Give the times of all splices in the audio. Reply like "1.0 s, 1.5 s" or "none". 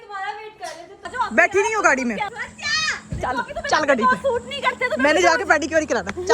1.1 s, 2.3 s

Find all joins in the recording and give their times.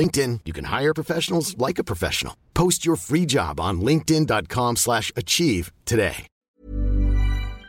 6.4 s

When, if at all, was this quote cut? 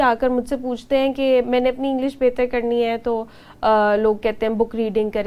none

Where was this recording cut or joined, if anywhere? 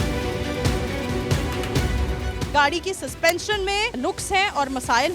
2.4 s

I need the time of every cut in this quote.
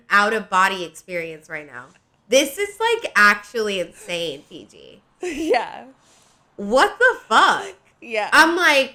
none

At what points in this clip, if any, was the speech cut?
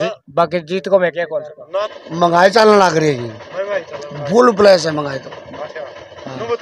1.7 s

